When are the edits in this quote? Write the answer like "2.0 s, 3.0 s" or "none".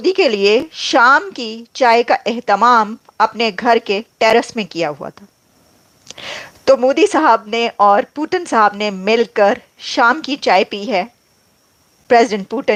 none